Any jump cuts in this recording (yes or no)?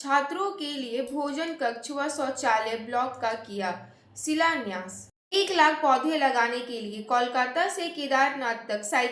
yes